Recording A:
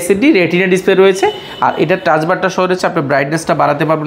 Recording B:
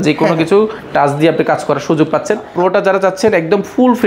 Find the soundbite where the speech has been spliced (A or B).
B